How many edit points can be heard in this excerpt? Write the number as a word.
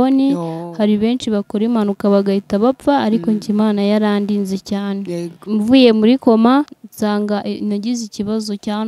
two